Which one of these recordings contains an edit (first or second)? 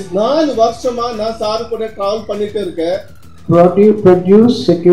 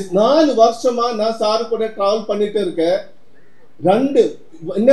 first